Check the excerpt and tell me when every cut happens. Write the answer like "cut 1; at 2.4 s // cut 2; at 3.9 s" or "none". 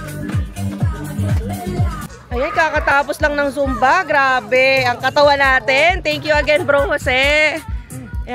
cut 1; at 2.1 s